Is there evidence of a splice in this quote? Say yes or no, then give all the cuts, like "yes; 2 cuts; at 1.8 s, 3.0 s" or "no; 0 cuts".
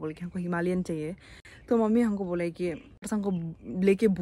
yes; 1 cut; at 2.9 s